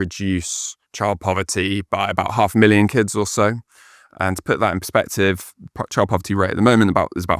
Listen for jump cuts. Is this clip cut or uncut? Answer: uncut